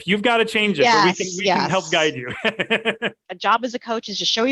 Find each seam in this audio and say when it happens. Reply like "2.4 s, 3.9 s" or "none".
3.3 s

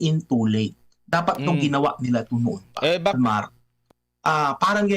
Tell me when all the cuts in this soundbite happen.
3.1 s

